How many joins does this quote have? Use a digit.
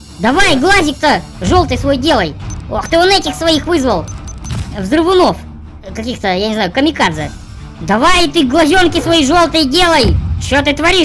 0